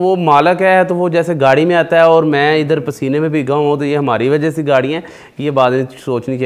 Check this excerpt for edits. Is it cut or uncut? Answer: uncut